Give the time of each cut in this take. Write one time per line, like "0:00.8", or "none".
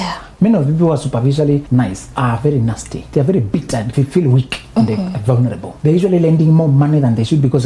0:01.8
0:02.9
0:03.9
0:05.7